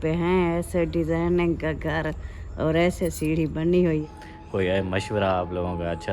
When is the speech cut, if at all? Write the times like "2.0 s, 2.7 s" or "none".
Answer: 4.1 s